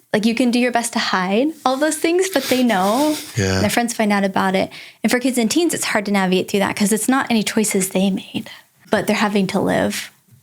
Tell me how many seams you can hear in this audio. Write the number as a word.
two